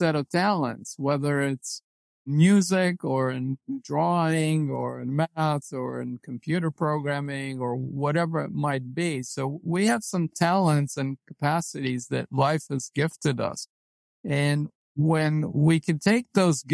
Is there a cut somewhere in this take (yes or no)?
yes